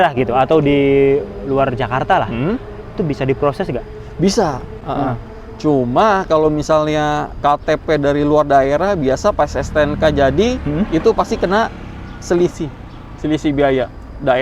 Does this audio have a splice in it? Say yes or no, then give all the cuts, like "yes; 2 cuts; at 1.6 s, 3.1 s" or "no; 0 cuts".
no; 0 cuts